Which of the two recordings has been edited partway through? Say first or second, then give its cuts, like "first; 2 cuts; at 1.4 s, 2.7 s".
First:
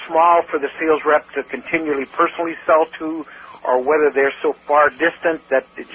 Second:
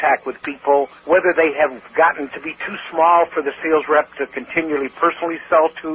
second; 2 cuts; at 1.0 s, 1.8 s